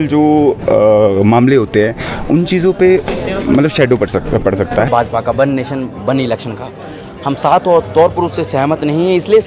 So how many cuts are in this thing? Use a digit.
1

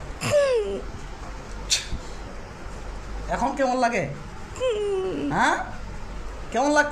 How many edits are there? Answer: 0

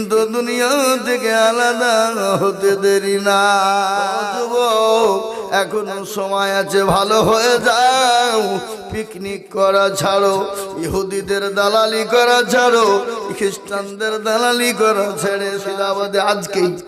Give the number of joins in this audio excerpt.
2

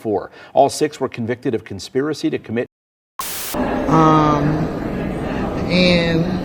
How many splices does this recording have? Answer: 1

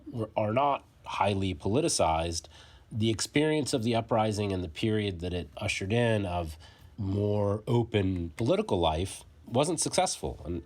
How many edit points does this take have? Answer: 1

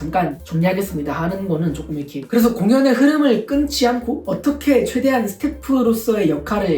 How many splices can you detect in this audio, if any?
1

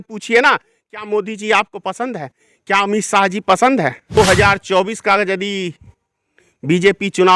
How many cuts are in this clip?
1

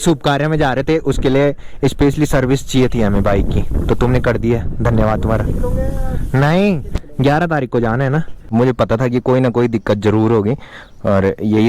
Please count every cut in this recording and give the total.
1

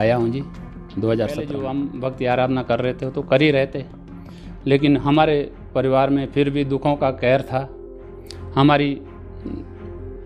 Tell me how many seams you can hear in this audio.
1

